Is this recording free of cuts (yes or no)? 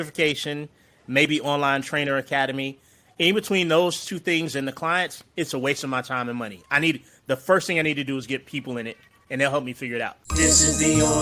no